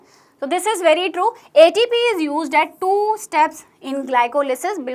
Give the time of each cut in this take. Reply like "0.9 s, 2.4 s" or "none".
none